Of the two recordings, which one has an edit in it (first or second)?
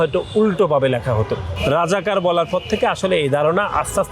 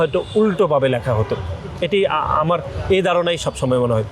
first